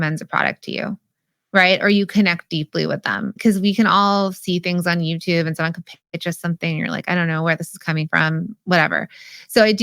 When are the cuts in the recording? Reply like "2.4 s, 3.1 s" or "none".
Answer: 3.3 s